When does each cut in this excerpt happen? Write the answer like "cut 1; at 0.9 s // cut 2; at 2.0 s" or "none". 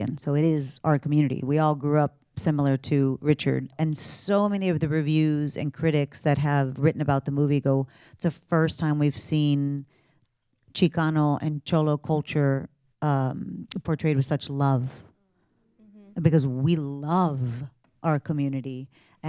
cut 1; at 3.7 s